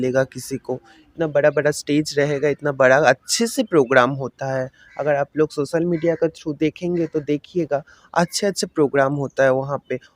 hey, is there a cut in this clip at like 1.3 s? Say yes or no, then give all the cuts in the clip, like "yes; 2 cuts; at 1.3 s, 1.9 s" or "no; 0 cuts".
no; 0 cuts